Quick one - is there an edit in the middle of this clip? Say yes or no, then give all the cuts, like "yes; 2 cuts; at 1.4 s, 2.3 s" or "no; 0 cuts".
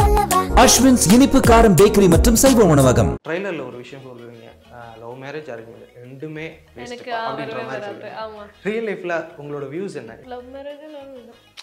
yes; 2 cuts; at 3.2 s, 10.1 s